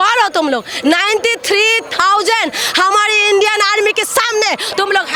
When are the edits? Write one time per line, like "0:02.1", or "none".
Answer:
none